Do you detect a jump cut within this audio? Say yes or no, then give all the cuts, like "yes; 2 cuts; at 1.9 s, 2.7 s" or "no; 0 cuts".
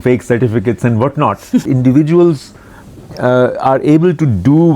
yes; 1 cut; at 1.7 s